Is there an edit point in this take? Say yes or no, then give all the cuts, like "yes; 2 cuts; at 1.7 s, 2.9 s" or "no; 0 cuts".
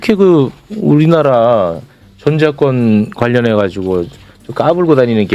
no; 0 cuts